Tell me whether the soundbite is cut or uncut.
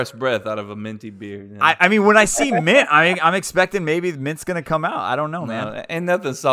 uncut